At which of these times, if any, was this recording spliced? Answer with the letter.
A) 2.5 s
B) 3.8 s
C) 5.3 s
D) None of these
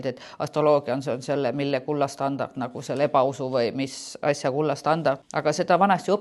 C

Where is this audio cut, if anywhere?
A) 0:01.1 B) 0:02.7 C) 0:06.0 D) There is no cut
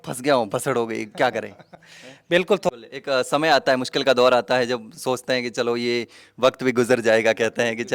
B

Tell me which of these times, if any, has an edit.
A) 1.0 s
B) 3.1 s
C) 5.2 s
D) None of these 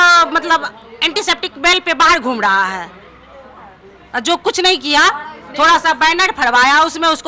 D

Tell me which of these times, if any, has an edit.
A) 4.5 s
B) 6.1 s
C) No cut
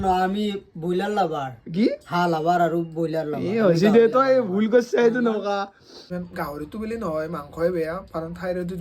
B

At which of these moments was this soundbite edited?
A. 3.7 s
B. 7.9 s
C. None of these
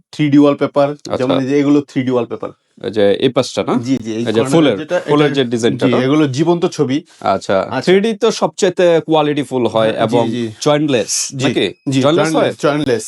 C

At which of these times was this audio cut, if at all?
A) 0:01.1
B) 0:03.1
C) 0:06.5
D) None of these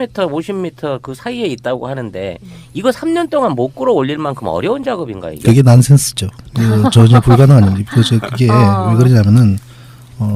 A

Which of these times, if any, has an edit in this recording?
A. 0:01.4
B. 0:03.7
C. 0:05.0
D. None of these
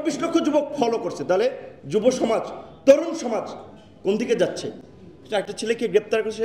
D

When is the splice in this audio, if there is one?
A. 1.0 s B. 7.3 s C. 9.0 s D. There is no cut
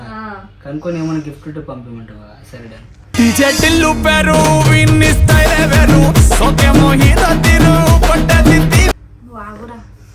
D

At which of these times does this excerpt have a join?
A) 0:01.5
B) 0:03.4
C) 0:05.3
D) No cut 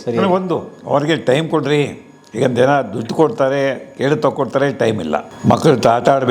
C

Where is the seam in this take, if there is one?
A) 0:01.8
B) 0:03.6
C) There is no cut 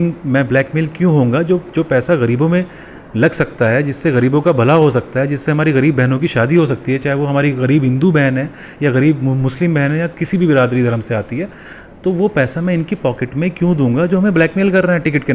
C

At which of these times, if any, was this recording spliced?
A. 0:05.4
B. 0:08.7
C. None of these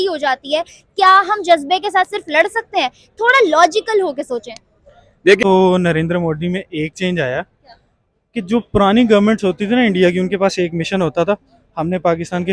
A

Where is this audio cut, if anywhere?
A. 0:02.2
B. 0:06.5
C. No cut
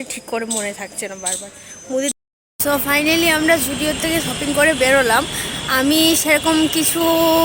A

